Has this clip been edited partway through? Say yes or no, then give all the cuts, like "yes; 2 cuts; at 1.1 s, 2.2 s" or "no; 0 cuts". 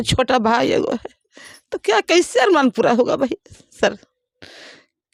no; 0 cuts